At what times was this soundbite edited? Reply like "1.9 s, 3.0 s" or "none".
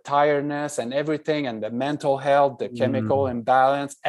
none